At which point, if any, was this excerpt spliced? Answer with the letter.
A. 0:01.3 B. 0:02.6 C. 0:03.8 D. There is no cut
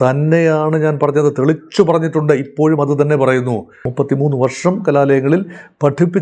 C